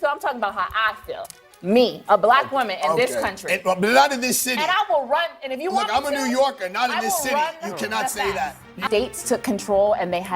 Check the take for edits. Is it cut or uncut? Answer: cut